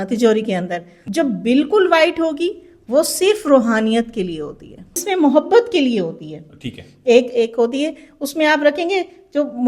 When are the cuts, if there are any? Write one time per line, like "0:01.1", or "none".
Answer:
0:00.9
0:05.0